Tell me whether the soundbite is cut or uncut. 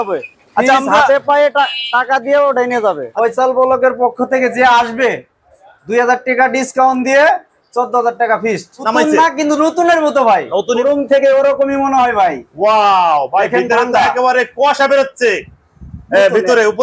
cut